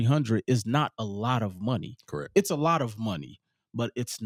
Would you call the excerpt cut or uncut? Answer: uncut